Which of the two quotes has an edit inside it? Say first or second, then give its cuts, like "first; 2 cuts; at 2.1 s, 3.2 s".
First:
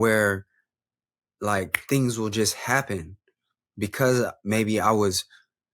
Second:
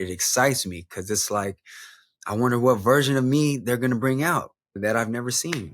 second; 1 cut; at 4.8 s